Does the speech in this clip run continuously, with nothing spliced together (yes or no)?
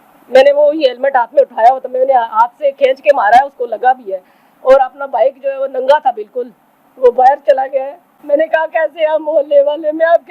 no